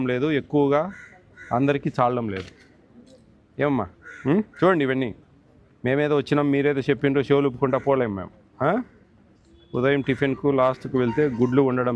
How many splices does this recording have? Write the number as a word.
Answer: zero